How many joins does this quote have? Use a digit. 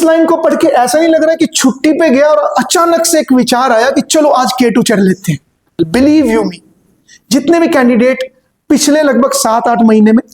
1